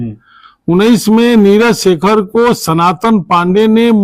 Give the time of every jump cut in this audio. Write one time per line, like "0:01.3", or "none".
none